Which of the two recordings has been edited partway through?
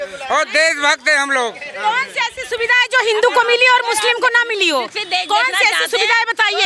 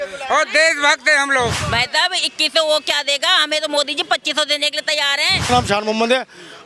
second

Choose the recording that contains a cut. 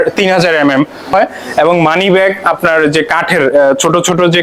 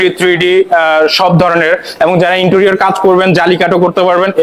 first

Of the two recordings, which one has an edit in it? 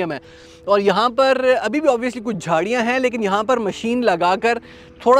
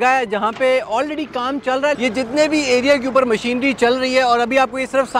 second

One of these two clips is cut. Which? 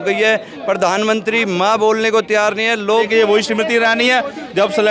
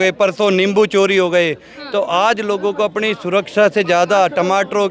first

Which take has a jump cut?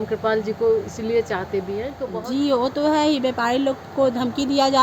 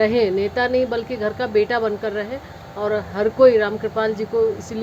first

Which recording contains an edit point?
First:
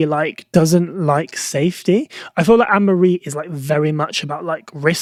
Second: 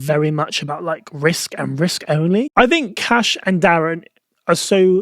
second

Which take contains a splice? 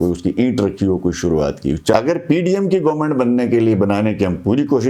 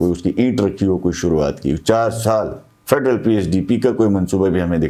first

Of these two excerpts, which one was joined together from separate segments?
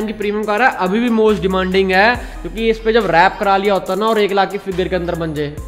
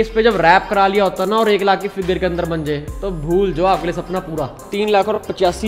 second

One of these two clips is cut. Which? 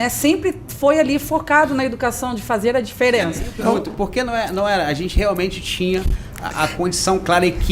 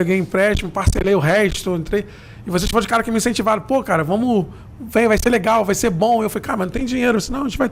first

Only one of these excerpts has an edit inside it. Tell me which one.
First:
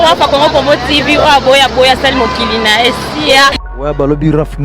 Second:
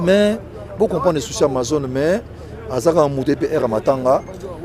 first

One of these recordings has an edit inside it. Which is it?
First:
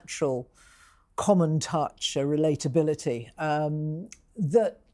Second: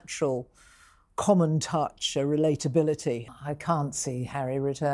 second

